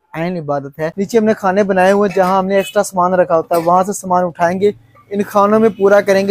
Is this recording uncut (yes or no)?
no